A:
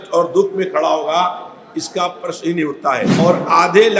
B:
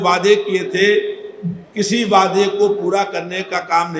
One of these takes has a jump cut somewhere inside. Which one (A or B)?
A